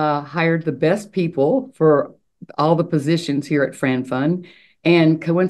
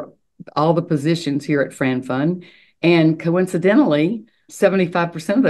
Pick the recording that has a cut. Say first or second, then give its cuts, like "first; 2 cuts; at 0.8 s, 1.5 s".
second; 1 cut; at 4.4 s